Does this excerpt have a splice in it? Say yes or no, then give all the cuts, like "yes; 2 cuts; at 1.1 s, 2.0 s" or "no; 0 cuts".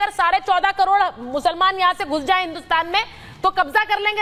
no; 0 cuts